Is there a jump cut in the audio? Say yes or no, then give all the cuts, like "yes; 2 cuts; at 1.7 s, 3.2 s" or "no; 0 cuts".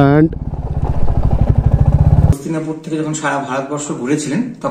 yes; 1 cut; at 2.3 s